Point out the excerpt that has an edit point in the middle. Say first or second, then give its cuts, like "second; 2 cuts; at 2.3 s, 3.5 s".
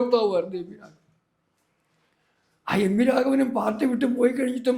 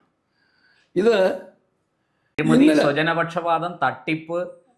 second; 1 cut; at 2.4 s